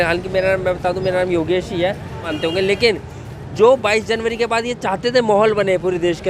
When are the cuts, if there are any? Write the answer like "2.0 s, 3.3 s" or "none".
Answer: 2.3 s